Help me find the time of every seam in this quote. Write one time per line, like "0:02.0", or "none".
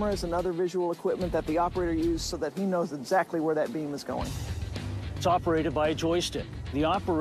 0:04.9